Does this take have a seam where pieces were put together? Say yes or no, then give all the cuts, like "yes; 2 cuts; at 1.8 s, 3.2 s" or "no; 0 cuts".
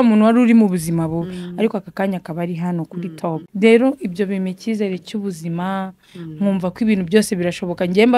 yes; 1 cut; at 3.5 s